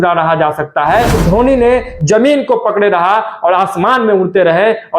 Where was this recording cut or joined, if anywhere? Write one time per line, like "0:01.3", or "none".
0:01.2